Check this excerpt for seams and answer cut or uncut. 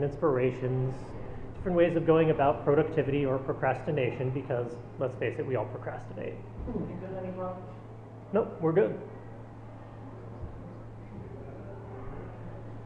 uncut